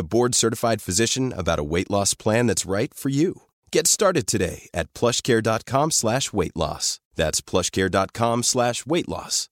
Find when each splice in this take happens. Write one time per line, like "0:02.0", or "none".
none